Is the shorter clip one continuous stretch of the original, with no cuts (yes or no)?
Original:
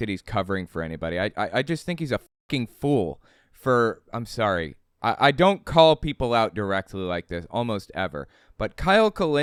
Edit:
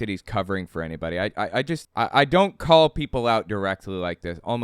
no